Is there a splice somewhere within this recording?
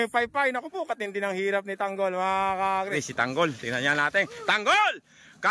yes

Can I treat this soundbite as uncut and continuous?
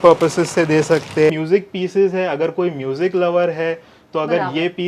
no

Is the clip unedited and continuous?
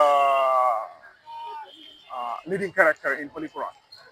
yes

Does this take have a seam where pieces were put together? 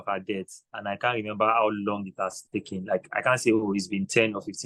no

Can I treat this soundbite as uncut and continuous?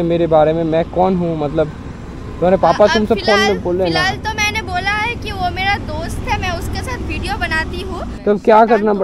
no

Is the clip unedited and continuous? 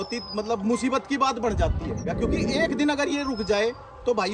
no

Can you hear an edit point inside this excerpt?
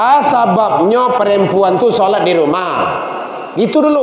no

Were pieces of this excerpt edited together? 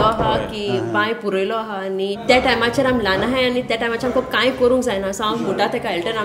yes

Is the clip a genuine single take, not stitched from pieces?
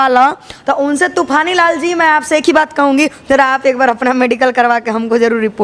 yes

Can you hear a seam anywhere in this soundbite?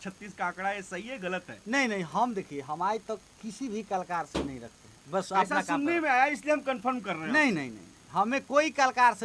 no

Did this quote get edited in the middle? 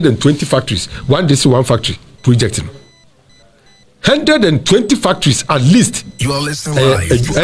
no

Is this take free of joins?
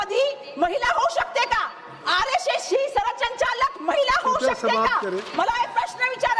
yes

